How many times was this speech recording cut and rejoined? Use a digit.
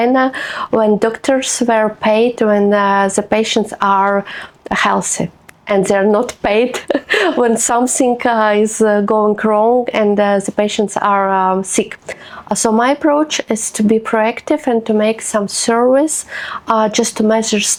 0